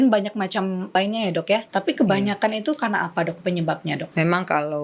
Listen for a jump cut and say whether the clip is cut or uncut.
cut